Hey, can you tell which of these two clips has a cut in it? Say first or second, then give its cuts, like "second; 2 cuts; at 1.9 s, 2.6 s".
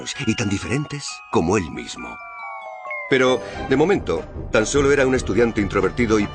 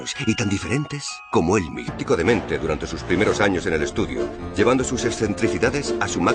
first; 1 cut; at 2.0 s